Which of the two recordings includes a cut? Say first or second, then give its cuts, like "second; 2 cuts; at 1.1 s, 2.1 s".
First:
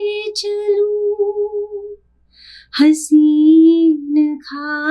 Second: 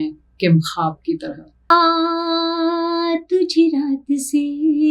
second; 1 cut; at 1.7 s